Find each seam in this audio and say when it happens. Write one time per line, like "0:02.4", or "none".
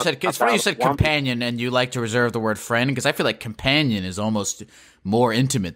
none